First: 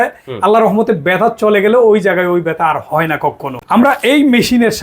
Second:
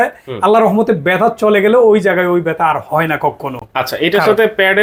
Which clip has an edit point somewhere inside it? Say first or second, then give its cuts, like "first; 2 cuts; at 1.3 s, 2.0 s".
first; 1 cut; at 3.6 s